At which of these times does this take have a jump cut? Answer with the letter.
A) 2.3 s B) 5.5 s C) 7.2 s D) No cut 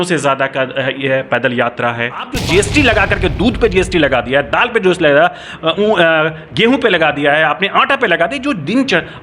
A